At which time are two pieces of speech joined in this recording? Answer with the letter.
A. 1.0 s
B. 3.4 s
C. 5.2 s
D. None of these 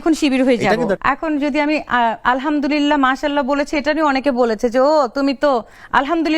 A